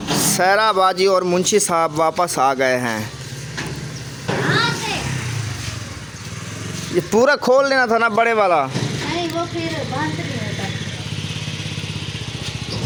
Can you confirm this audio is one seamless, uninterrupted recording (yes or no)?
yes